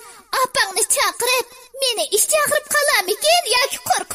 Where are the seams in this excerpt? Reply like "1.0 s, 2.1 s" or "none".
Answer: 1.6 s

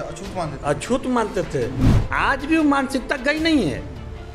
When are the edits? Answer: 2.0 s

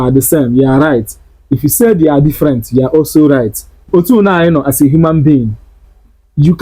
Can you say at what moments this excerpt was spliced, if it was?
3.9 s

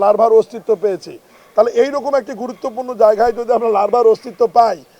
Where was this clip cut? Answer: none

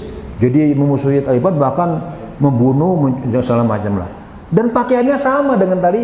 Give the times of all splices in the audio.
none

